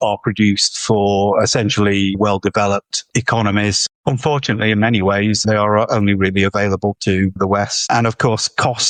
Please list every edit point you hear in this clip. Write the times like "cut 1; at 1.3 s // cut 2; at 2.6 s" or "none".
none